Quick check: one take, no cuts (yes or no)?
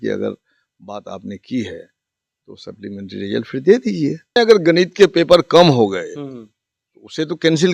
no